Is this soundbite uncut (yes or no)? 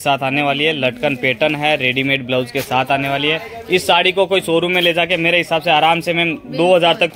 yes